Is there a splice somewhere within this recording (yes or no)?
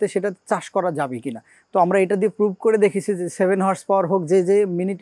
no